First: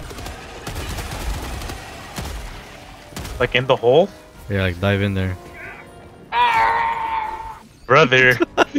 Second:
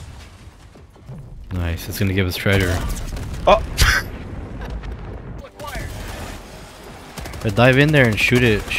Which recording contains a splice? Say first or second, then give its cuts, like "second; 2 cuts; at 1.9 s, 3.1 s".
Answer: second; 1 cut; at 5.4 s